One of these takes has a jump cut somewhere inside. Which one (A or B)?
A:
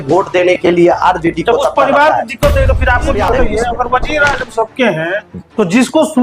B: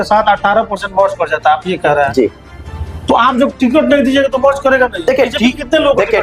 A